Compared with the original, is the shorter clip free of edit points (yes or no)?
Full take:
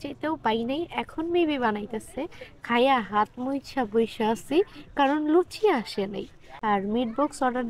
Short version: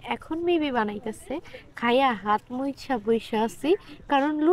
yes